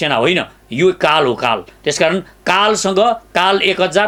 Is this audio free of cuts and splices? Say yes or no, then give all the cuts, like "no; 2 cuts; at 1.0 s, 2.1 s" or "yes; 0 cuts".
yes; 0 cuts